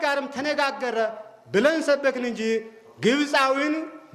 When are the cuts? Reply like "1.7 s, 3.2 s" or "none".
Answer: none